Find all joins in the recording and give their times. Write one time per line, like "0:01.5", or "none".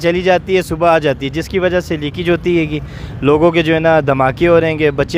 none